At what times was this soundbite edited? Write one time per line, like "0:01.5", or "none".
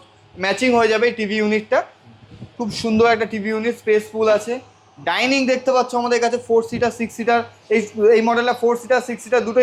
none